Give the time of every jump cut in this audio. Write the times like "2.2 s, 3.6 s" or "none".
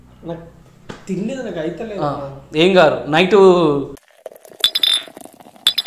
none

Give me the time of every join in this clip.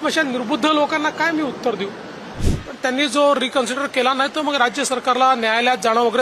2.4 s

